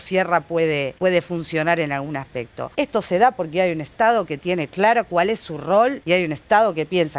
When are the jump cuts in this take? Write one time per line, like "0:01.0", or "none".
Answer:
0:00.9
0:02.6
0:06.0